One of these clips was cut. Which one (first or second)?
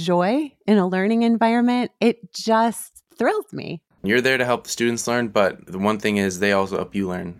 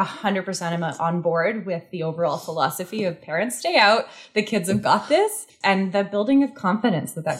first